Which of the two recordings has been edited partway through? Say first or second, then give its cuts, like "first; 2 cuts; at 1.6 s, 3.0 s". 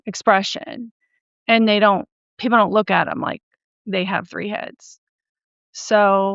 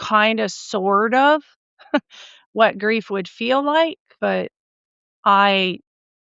second; 1 cut; at 4.6 s